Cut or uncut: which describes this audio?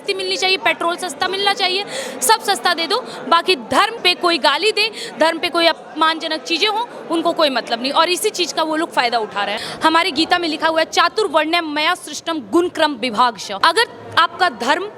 cut